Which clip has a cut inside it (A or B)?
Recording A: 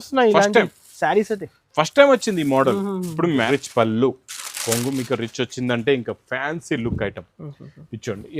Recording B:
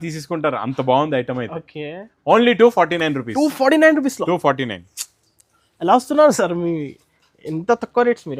A